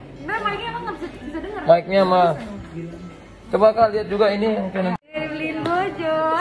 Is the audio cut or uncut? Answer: cut